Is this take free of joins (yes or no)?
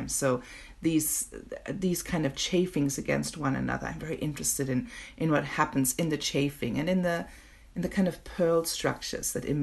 yes